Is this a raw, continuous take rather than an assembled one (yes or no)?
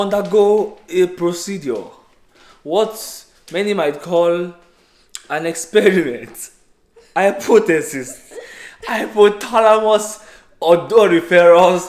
yes